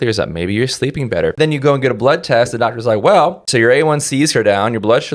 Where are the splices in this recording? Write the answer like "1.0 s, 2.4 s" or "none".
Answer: 1.3 s, 3.5 s